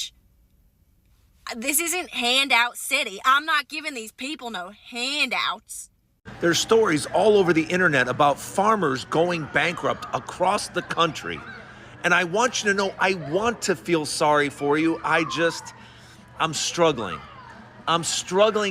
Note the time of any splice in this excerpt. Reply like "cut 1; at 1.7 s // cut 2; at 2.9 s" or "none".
cut 1; at 6.2 s